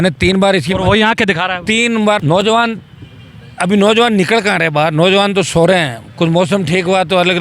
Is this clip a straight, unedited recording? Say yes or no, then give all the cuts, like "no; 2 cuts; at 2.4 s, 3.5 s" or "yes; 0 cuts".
no; 1 cut; at 2.2 s